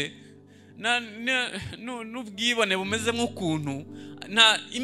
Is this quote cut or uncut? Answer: uncut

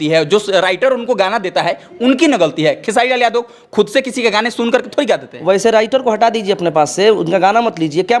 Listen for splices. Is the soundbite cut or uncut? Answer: uncut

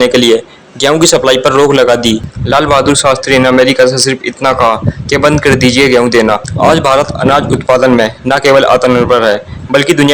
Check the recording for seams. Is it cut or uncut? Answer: cut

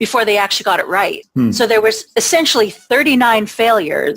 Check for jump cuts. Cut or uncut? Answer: cut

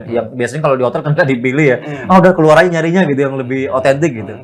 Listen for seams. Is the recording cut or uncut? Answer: uncut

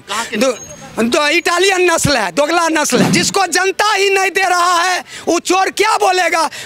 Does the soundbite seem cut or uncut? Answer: cut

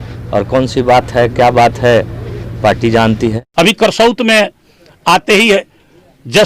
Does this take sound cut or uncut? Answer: cut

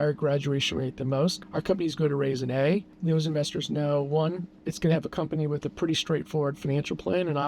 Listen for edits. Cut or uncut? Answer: cut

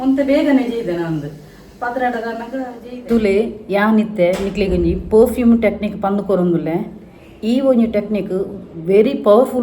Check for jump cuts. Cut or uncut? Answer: cut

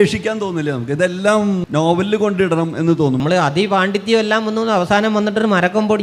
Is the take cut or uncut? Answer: cut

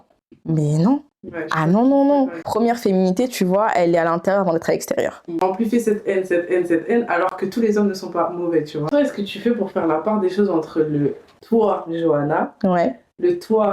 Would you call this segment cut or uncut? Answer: cut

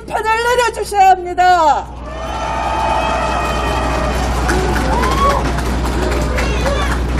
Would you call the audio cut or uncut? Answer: uncut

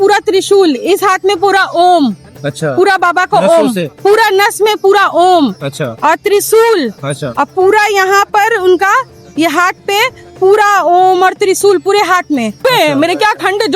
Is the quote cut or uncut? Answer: cut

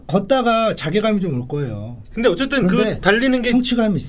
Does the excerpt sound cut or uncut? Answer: uncut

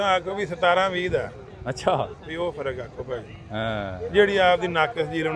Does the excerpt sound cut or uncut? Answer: uncut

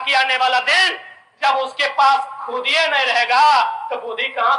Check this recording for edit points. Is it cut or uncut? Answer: uncut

